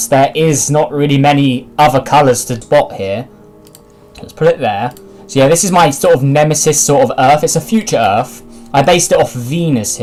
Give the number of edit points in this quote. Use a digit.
0